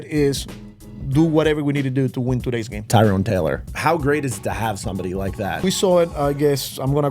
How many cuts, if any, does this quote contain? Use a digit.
3